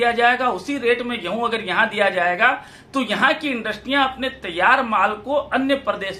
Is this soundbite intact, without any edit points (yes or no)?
yes